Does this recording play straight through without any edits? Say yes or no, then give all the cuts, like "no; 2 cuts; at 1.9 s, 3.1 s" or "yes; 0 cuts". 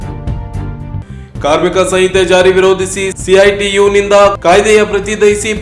no; 1 cut; at 1.0 s